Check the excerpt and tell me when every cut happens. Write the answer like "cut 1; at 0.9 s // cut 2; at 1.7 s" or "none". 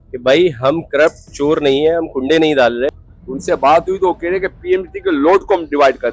cut 1; at 2.9 s